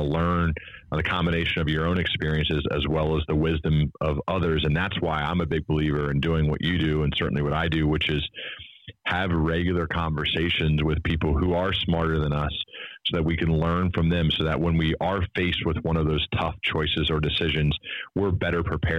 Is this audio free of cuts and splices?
yes; 0 cuts

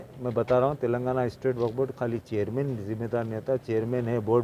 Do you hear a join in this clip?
no; 0 cuts

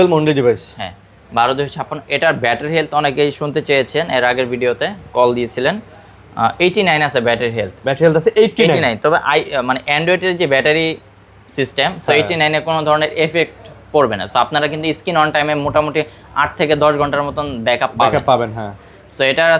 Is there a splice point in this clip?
no; 0 cuts

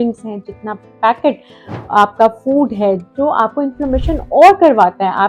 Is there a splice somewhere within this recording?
no; 0 cuts

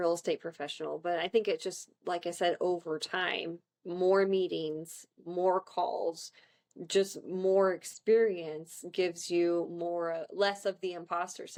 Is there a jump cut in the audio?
no; 0 cuts

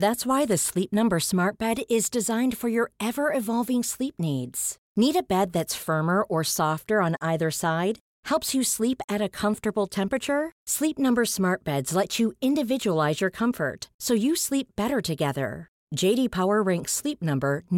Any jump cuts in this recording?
no; 0 cuts

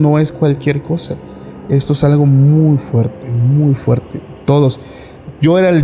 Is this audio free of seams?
yes; 0 cuts

